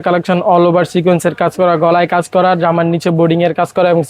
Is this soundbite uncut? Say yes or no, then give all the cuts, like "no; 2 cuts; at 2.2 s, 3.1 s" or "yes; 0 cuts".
yes; 0 cuts